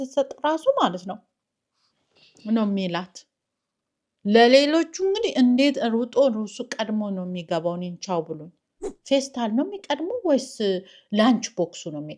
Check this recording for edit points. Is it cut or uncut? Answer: cut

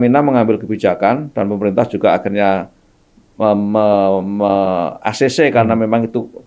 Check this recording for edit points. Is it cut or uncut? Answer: uncut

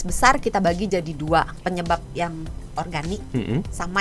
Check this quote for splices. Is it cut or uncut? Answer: cut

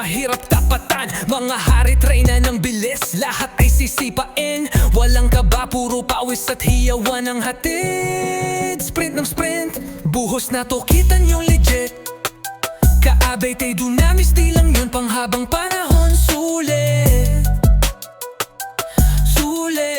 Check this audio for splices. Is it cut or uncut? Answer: uncut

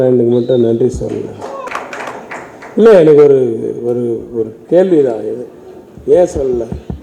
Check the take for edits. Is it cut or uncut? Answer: cut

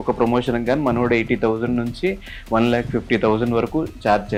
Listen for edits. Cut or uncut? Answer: uncut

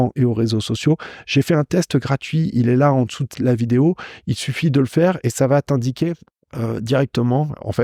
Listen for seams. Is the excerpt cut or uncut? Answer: uncut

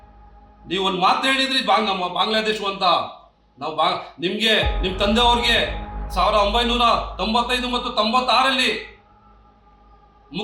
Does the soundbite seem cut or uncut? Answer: uncut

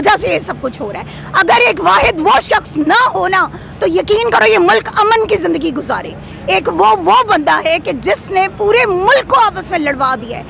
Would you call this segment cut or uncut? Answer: uncut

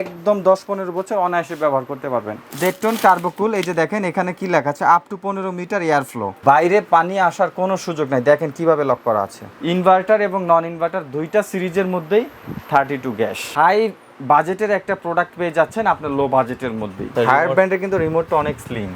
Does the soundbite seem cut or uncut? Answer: cut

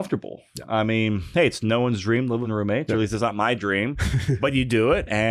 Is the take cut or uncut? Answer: cut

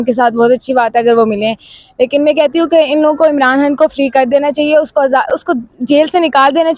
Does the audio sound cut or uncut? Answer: uncut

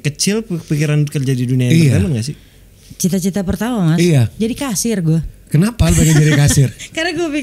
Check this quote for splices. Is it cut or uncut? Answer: uncut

